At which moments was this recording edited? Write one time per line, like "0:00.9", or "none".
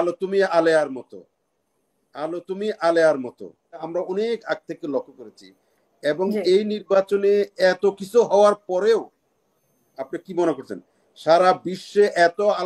0:03.9